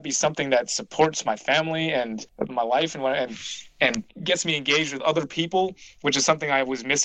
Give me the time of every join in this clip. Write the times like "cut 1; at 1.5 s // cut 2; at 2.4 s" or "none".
cut 1; at 2.2 s // cut 2; at 4.2 s